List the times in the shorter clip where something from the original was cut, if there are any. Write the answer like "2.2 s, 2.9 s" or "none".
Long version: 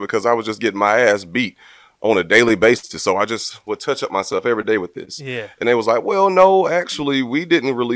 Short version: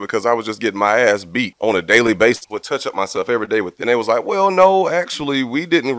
1.5 s, 2.5 s, 3.7 s